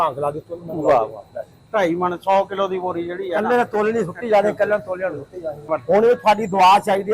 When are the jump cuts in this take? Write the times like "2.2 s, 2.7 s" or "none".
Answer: 5.7 s